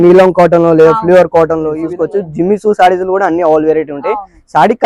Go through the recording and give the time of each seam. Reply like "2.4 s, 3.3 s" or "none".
1.8 s